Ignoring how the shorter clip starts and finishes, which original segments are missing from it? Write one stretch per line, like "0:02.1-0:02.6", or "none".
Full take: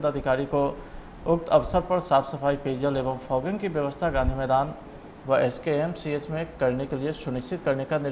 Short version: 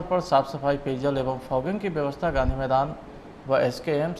none

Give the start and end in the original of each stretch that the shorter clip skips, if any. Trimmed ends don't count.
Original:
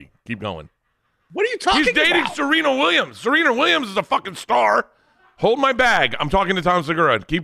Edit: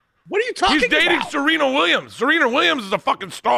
none

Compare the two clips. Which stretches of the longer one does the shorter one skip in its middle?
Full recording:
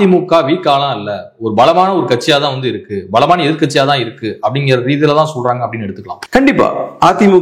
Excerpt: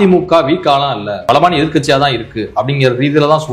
0:01.1-0:03.0

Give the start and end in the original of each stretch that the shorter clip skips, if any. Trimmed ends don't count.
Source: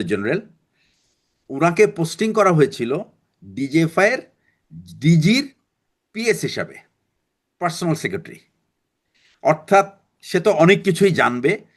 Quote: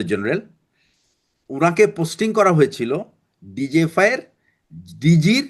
none

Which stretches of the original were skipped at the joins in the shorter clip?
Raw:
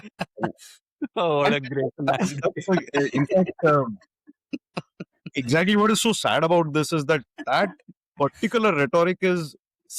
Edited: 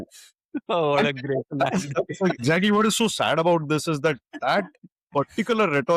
0:02.9-0:05.5

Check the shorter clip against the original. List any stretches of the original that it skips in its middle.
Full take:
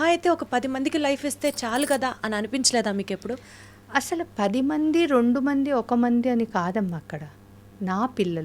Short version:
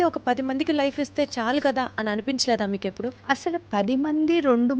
0:03.4-0:03.8

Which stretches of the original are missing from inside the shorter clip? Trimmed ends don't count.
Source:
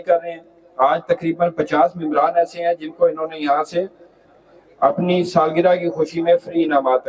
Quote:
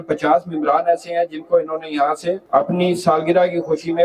0:03.9-0:04.7

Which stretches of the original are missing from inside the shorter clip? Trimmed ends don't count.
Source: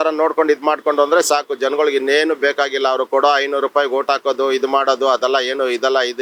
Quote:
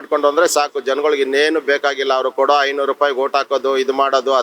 none

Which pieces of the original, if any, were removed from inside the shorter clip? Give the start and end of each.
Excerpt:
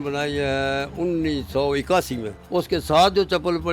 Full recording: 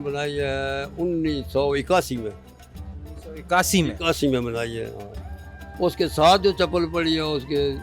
0:02.3-0:05.6

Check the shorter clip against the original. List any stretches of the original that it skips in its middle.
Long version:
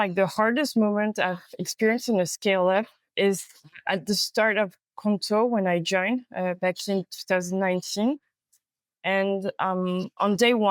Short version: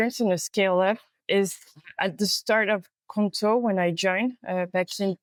none

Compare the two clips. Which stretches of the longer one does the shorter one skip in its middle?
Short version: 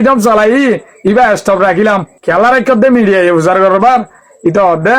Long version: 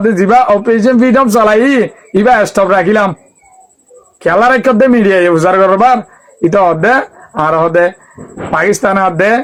0:03.2-0:04.1

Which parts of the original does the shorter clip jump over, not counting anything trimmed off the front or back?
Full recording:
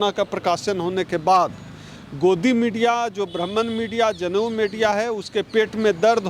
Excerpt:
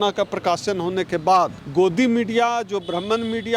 0:01.6-0:02.1

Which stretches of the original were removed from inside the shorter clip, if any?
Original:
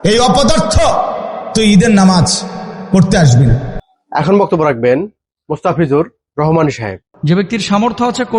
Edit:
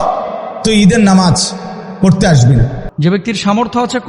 0:03.7-0:07.1

